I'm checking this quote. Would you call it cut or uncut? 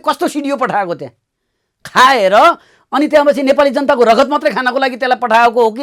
uncut